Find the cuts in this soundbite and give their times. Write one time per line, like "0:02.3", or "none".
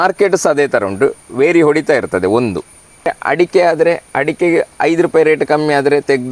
0:03.2